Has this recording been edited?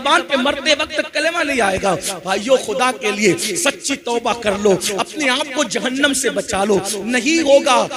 no; 0 cuts

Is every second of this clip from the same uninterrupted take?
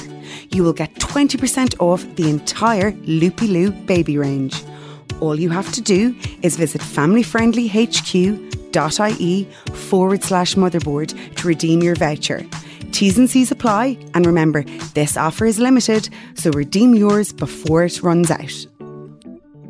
no; 1 cut; at 18.4 s

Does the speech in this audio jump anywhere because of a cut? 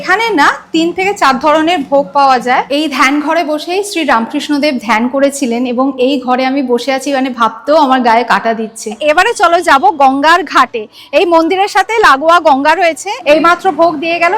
yes; 3 cuts; at 2.7 s, 9.0 s, 13.1 s

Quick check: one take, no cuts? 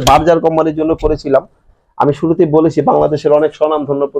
yes; 0 cuts

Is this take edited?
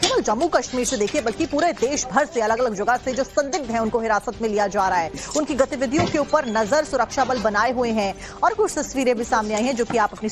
yes; 1 cut; at 3.8 s

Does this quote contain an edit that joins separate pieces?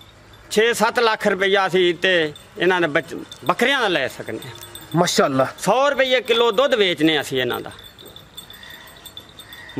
no; 0 cuts

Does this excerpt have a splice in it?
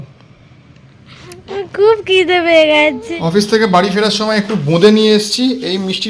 yes; 1 cut; at 3.1 s

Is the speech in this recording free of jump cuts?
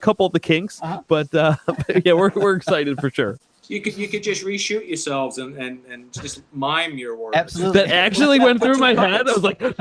yes; 0 cuts

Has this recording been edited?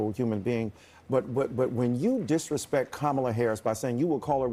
no; 0 cuts

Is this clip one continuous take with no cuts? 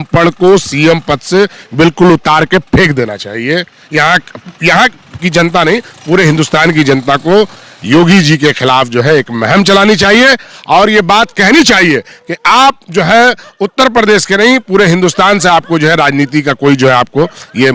yes; 0 cuts

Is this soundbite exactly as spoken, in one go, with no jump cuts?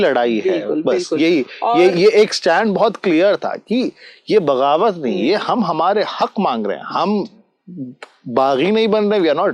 yes; 0 cuts

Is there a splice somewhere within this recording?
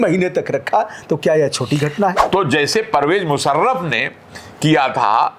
yes; 1 cut; at 2.2 s

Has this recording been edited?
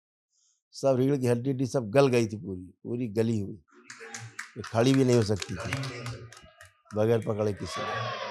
no; 0 cuts

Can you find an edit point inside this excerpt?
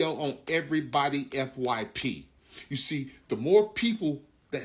yes; 1 cut; at 2.3 s

